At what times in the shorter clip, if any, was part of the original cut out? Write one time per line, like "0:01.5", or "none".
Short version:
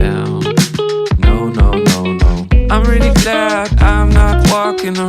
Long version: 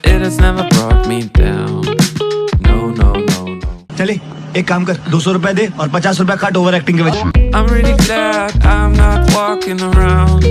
0:02.5